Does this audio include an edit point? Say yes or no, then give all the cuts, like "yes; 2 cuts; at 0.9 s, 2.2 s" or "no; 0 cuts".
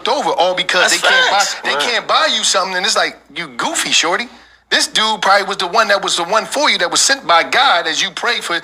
no; 0 cuts